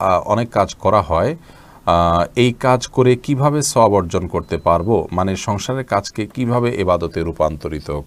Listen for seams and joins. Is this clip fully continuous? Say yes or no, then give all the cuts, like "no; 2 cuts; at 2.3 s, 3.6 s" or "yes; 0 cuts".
yes; 0 cuts